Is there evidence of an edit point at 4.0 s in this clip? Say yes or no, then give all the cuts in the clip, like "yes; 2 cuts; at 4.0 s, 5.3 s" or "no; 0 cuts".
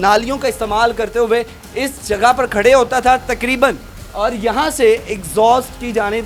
no; 0 cuts